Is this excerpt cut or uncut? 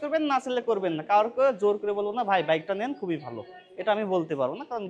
uncut